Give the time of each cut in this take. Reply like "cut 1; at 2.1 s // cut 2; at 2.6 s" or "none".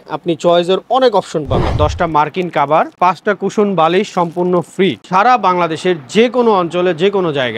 cut 1; at 1.7 s // cut 2; at 5.0 s